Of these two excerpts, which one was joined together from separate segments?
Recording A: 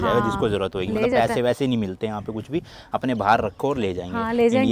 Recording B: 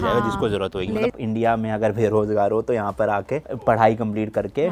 B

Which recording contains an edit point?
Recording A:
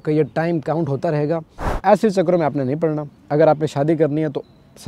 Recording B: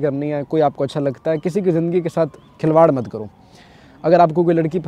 A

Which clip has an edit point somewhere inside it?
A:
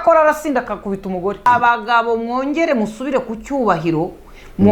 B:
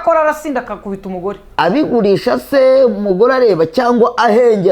A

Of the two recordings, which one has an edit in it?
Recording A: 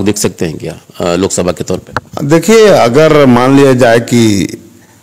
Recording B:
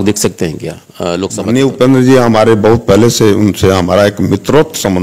B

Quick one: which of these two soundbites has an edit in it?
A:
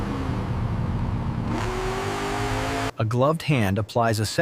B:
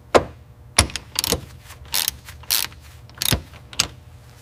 A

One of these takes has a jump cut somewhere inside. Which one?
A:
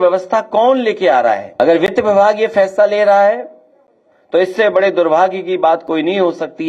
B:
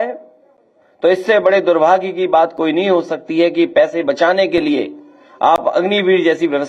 A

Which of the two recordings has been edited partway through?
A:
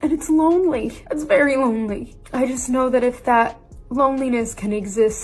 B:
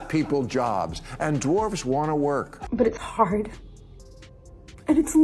B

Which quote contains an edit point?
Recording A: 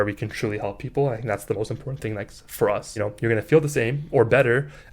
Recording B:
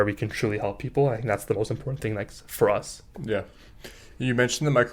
A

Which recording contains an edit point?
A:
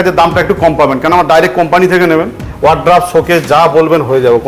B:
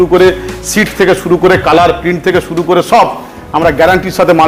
A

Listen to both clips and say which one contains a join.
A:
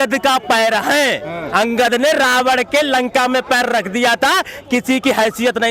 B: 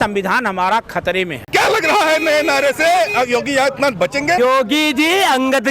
B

